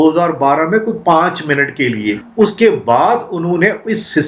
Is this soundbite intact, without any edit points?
no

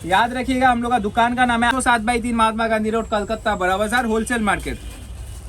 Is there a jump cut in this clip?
yes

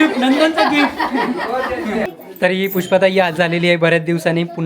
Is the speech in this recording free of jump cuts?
no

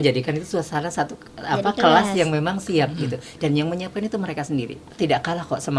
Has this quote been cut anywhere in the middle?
yes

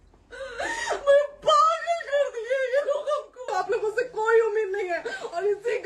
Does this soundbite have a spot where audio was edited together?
yes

